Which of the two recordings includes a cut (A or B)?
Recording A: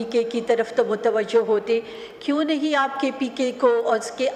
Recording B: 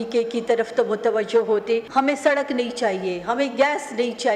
B